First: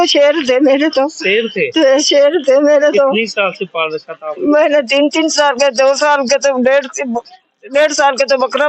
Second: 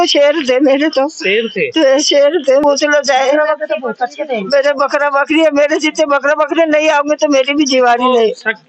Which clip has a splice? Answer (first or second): second